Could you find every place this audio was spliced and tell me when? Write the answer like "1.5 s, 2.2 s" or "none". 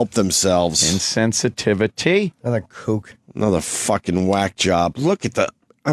none